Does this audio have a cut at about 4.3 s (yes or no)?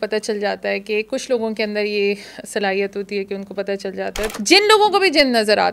yes